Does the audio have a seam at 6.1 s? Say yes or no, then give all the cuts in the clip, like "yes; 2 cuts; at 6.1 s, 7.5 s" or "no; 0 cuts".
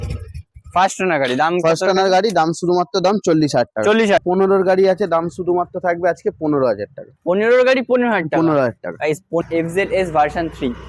no; 2 cuts; at 4.2 s, 9.4 s